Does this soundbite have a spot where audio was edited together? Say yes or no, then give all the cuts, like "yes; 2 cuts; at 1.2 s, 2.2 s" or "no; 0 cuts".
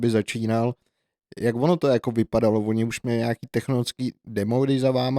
no; 0 cuts